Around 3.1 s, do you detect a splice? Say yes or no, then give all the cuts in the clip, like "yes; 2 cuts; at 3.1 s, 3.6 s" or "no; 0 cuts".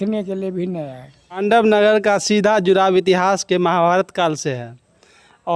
no; 1 cut; at 1.4 s